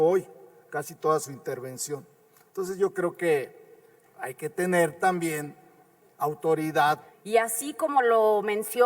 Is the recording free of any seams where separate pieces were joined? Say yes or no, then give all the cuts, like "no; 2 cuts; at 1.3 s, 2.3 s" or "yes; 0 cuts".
no; 1 cut; at 7.0 s